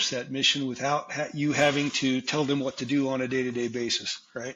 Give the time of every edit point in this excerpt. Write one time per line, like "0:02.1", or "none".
none